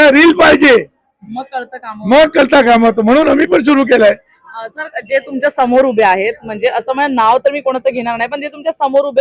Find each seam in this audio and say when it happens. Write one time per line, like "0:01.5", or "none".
none